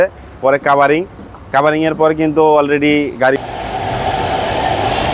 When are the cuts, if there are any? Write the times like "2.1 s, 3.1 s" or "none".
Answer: 3.4 s